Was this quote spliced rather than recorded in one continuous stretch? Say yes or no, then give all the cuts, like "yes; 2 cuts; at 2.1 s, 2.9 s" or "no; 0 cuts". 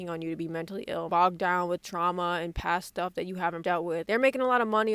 yes; 2 cuts; at 1.1 s, 3.7 s